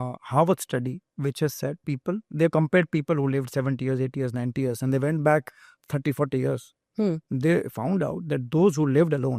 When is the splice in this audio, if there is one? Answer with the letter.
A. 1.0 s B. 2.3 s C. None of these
C